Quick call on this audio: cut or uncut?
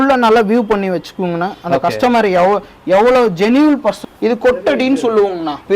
cut